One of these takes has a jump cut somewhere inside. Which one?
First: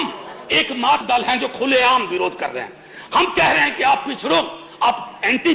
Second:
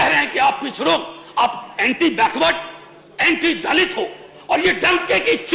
first; 1 cut; at 1.0 s

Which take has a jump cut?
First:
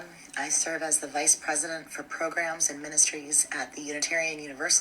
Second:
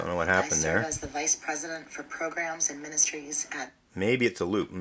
first; 1 cut; at 3.8 s

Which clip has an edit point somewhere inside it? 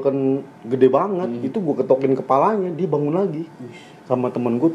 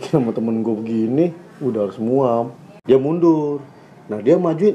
second; 1 cut; at 2.7 s

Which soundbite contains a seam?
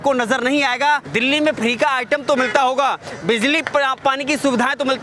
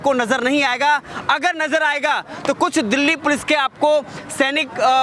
first; 1 cut; at 1.1 s

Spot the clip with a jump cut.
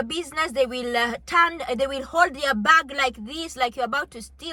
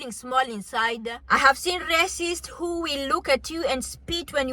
second; 1 cut; at 1.1 s

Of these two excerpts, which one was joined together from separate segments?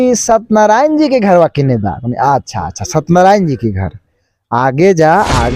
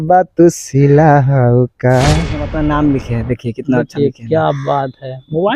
second; 1 cut; at 2.4 s

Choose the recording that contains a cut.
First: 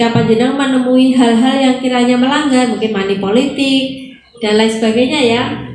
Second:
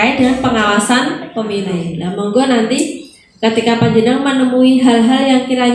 second; 1 cut; at 2.0 s

